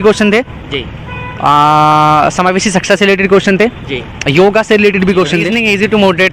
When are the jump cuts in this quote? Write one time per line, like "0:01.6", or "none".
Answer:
0:05.4